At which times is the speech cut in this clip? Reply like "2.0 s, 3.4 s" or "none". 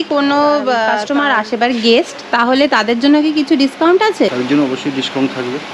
1.0 s, 4.3 s